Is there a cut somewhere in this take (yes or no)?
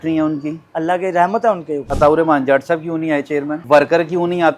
yes